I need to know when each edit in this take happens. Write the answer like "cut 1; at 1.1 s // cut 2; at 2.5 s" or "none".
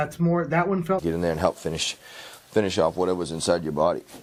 none